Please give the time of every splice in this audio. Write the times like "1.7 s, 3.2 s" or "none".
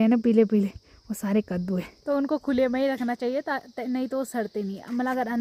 1.9 s